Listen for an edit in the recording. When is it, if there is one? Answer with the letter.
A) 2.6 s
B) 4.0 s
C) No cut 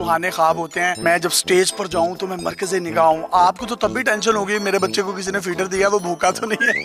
C